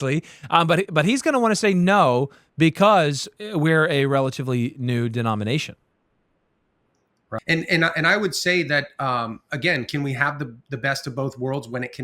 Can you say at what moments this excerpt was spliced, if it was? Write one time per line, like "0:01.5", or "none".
0:07.4